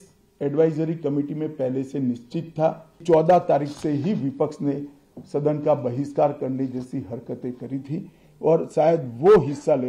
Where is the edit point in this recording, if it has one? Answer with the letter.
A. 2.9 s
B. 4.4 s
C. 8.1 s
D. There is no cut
A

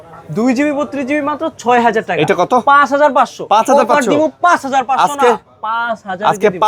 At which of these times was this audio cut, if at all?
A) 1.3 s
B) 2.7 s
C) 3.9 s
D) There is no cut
D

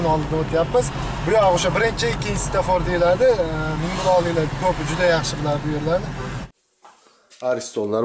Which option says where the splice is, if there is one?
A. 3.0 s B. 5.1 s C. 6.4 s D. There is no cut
C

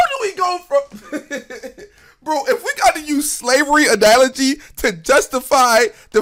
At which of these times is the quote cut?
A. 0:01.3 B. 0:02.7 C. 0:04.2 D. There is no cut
D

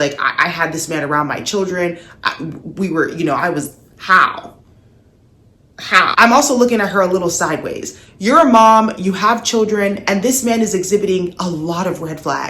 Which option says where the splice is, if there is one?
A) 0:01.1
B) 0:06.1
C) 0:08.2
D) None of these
B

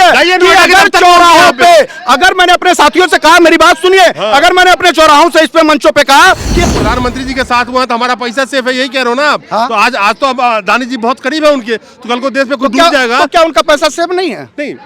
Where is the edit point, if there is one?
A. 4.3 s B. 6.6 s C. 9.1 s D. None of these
B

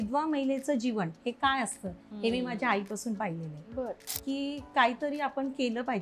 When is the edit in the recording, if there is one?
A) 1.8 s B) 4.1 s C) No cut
B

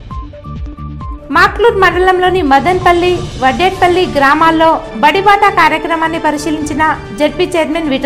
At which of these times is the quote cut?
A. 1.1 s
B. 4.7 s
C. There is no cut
A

